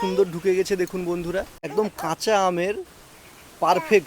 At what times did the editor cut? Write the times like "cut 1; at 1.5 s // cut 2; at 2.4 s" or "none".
cut 1; at 1.6 s